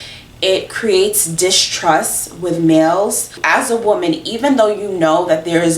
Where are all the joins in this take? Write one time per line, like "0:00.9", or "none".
0:03.3